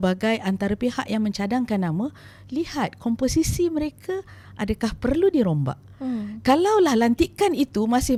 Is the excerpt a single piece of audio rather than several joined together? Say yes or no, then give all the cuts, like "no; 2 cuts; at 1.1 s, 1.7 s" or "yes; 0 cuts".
yes; 0 cuts